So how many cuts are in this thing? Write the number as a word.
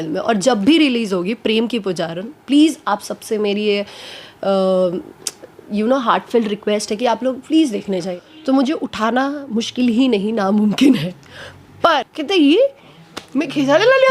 two